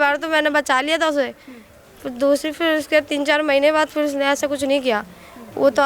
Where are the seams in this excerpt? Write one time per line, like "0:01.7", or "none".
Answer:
none